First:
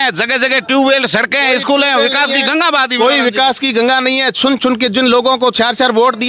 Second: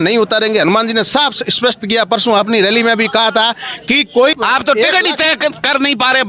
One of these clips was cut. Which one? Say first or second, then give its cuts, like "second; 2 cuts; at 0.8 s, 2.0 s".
second; 1 cut; at 4.3 s